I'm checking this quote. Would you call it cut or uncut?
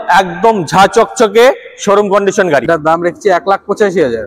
cut